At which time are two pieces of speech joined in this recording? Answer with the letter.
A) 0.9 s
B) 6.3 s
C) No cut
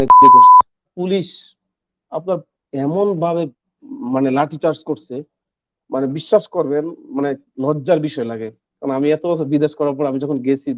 A